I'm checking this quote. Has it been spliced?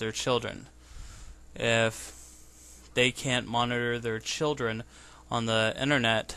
yes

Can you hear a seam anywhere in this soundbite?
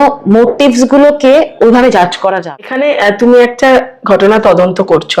yes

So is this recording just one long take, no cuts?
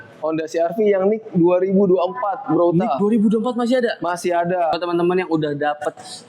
no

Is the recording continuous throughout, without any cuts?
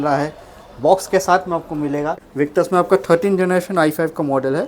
no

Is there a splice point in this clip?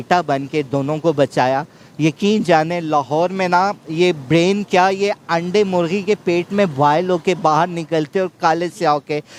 no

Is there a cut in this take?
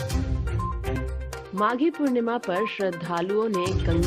yes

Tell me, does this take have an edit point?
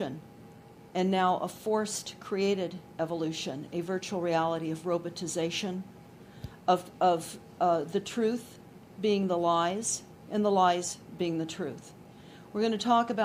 no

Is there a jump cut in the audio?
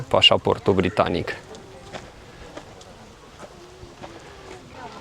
no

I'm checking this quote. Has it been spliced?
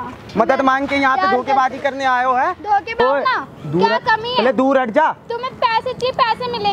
yes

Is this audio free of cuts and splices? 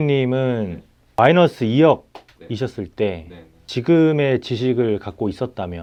yes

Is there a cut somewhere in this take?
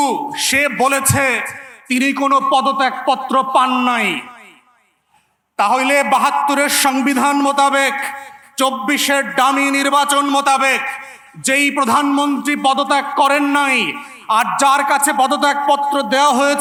no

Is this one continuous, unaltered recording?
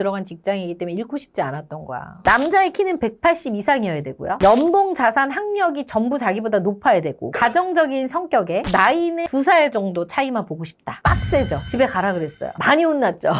no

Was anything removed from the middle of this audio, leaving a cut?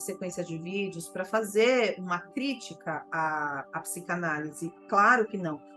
no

